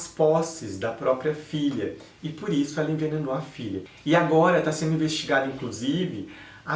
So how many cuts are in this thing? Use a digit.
1